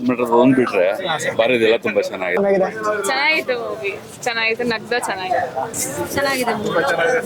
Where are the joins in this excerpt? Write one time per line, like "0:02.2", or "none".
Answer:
0:02.4
0:05.7